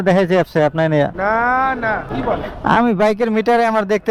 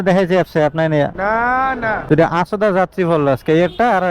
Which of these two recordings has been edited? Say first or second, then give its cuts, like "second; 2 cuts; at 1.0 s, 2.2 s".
second; 1 cut; at 2.1 s